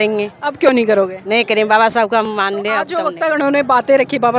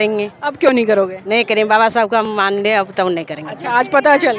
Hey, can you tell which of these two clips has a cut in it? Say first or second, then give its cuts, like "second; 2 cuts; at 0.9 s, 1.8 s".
first; 1 cut; at 3.0 s